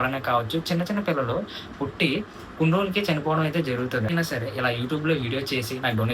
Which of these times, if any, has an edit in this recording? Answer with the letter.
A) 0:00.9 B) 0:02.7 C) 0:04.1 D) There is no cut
C